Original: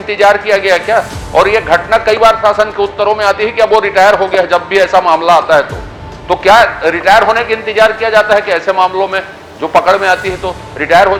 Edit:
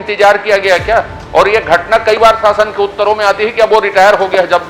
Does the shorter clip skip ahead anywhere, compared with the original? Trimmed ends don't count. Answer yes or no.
no